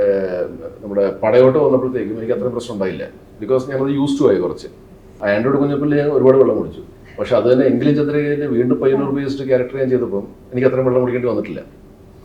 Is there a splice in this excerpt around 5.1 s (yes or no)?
yes